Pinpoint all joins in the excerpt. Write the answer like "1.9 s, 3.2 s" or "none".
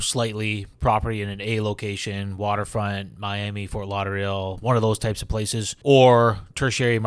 5.7 s